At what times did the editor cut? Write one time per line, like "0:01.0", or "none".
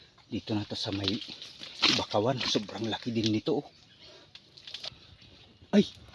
0:04.9